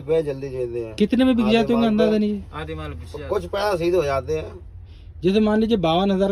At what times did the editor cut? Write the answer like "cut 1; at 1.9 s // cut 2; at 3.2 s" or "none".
none